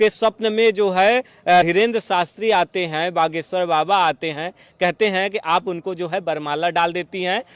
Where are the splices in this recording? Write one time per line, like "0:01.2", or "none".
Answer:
0:01.6